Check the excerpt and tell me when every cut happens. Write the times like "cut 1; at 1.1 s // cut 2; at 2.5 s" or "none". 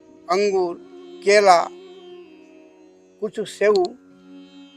cut 1; at 1.7 s // cut 2; at 3.1 s

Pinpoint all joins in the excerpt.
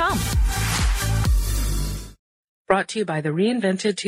cut 1; at 2.1 s

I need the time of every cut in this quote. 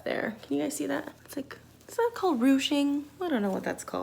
cut 1; at 1.2 s

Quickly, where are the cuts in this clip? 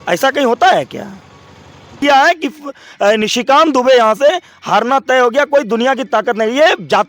cut 1; at 2.0 s

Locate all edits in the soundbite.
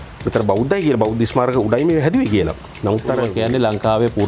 cut 1; at 3.3 s

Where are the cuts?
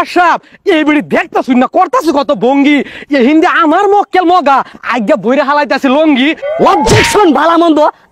cut 1; at 6.5 s

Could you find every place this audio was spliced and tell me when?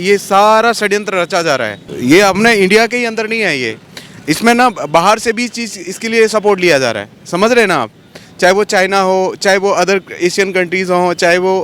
none

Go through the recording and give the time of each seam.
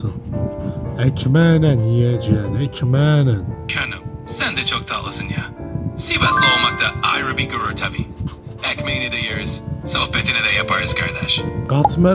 cut 1; at 3.6 s

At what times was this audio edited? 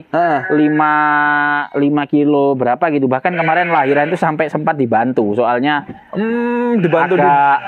none

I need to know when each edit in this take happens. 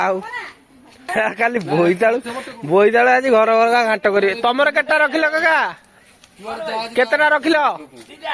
cut 1; at 1.1 s

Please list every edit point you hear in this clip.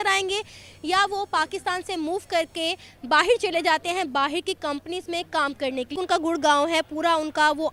cut 1; at 5.9 s

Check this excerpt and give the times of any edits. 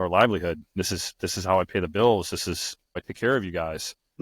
cut 1; at 3.1 s

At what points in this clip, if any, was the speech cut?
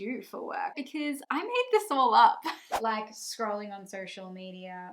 cut 1; at 0.8 s // cut 2; at 2.8 s

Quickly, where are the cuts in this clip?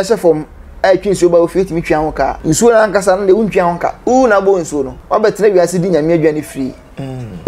cut 1; at 2.4 s // cut 2; at 4.0 s // cut 3; at 4.9 s

